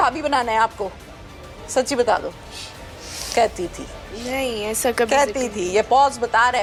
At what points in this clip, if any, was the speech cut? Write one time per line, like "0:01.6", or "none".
none